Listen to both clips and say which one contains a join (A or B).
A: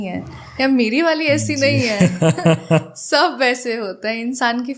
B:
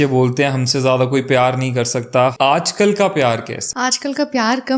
B